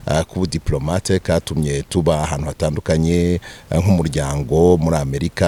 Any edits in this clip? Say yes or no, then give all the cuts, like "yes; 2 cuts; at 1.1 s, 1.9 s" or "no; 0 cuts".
no; 0 cuts